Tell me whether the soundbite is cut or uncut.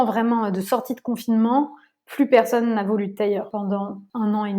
cut